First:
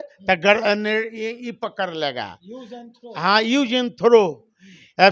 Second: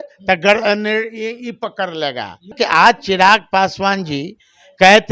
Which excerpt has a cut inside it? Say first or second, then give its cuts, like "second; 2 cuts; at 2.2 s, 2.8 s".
second; 1 cut; at 2.5 s